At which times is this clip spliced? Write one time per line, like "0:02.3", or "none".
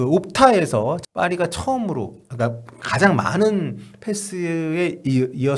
0:01.0